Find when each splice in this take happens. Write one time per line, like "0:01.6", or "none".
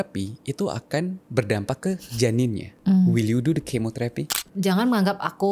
0:01.2
0:02.7
0:04.3